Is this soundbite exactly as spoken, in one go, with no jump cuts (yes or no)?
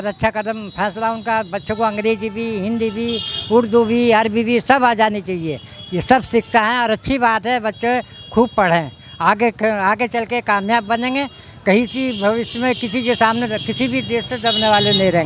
yes